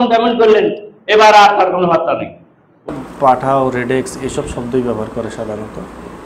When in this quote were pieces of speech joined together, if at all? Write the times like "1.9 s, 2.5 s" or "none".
2.9 s